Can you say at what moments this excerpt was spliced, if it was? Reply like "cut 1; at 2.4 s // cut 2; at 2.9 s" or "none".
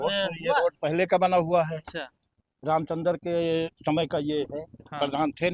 none